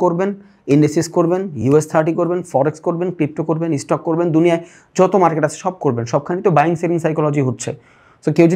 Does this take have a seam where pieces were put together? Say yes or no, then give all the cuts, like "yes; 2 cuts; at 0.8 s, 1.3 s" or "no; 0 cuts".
no; 0 cuts